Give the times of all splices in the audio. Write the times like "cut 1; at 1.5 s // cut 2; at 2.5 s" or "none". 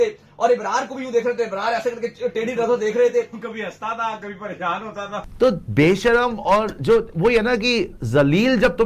cut 1; at 5.2 s